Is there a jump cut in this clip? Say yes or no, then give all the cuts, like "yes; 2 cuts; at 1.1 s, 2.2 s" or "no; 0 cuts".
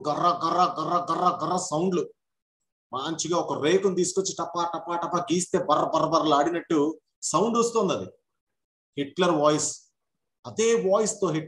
no; 0 cuts